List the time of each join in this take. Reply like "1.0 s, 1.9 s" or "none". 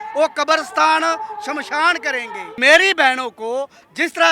2.4 s